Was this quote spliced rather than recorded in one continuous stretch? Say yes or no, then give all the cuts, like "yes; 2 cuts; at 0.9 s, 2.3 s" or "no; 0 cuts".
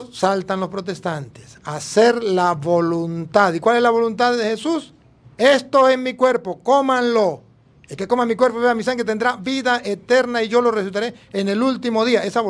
no; 0 cuts